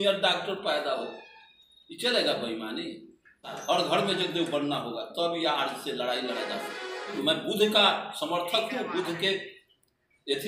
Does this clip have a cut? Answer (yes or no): yes